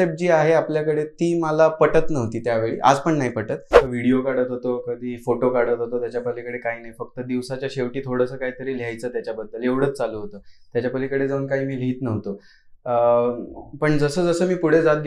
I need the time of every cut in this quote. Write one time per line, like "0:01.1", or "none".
0:03.7